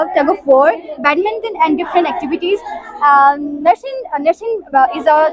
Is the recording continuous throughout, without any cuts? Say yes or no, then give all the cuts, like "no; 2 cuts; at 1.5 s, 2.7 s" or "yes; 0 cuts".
yes; 0 cuts